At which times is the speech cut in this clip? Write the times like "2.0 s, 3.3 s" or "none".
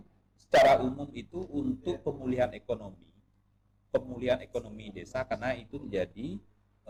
none